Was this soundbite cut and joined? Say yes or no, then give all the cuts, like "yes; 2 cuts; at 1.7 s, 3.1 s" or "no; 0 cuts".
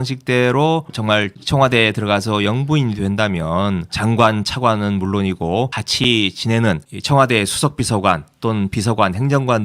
yes; 1 cut; at 3.9 s